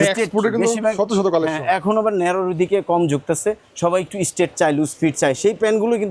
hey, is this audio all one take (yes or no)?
yes